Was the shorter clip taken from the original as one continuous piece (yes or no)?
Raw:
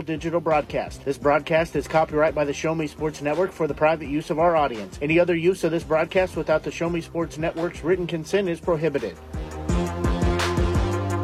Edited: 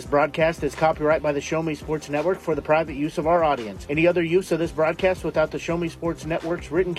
yes